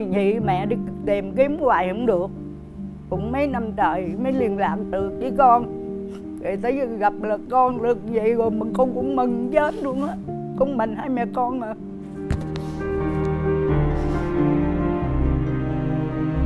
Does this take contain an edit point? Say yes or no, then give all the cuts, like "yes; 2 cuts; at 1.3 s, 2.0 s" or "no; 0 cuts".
no; 0 cuts